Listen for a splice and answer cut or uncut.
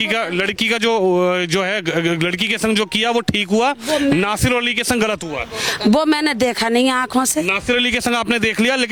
uncut